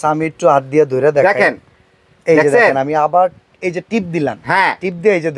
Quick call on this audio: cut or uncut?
uncut